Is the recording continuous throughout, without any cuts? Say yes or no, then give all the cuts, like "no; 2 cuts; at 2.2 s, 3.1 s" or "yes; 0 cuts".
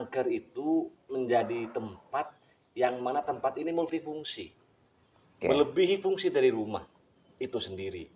yes; 0 cuts